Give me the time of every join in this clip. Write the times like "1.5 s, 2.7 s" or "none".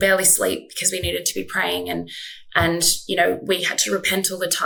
none